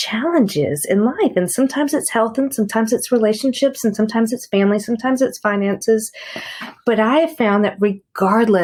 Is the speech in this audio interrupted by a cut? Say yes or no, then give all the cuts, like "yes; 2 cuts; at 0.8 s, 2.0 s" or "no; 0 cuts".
no; 0 cuts